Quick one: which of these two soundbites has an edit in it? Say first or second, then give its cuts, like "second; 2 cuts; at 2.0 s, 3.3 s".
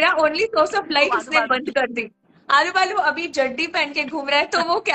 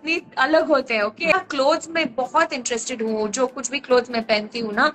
second; 1 cut; at 1.3 s